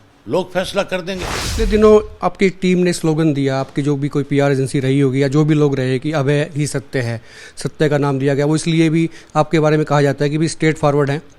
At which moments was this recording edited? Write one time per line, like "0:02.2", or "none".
0:01.4